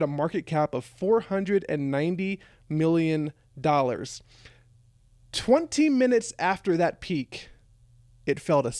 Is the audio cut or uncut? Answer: uncut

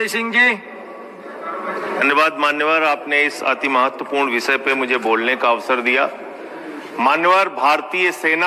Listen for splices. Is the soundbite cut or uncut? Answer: uncut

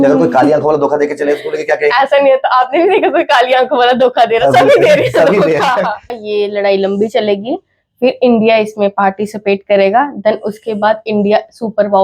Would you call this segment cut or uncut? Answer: cut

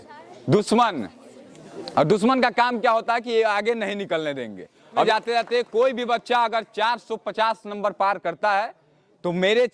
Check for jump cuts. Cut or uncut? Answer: cut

